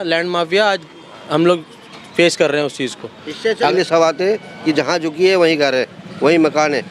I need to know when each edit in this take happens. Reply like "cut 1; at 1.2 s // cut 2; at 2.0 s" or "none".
cut 1; at 3.7 s